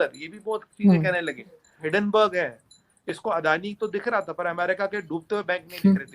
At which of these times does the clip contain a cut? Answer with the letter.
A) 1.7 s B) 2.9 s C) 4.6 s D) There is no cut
A